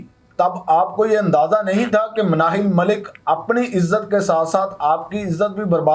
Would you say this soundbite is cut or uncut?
uncut